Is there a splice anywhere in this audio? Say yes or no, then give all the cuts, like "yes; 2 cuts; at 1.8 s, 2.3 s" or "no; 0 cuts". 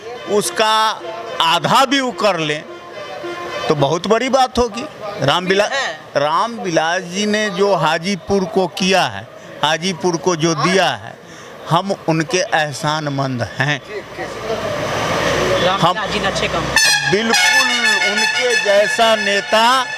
no; 0 cuts